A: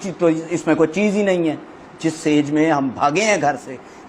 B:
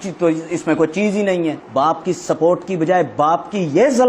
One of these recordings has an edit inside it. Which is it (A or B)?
B